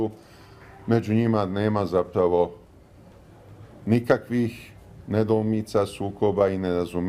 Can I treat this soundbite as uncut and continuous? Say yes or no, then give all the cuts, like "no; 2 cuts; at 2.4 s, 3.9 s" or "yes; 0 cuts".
no; 1 cut; at 2.6 s